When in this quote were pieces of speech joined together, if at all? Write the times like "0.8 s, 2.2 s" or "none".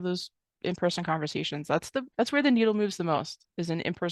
2.1 s

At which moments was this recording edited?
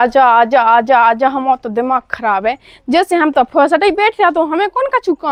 none

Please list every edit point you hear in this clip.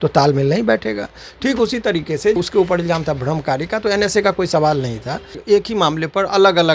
2.4 s, 5.4 s

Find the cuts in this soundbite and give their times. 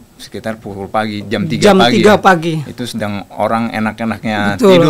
none

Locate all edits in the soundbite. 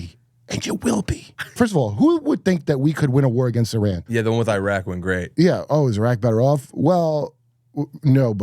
1.5 s, 4.0 s, 5.3 s

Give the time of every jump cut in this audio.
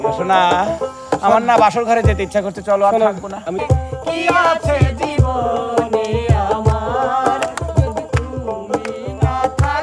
3.6 s

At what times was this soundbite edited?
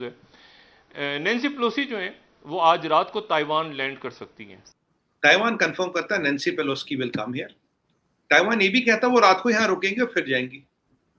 4.7 s

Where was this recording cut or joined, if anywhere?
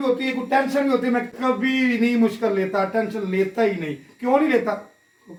none

